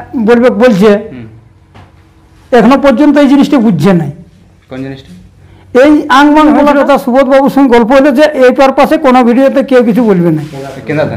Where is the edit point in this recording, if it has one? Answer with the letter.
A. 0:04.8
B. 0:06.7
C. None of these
B